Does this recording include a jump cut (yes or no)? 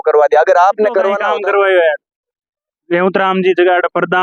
yes